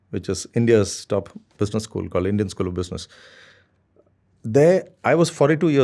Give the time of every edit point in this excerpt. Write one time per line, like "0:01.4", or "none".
none